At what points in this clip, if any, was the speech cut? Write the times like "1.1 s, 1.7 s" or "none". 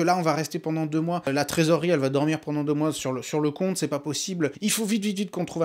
1.3 s, 4.6 s